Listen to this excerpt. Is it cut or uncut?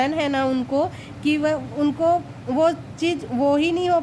uncut